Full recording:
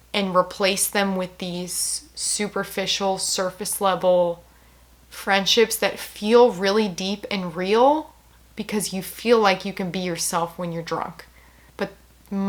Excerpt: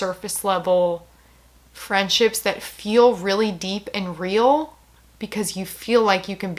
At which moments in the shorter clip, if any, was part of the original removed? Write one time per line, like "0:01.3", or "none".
none